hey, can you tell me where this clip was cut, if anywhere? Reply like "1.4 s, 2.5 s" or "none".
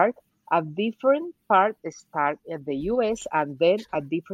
none